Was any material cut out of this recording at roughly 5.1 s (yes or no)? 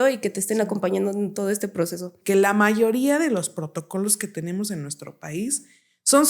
no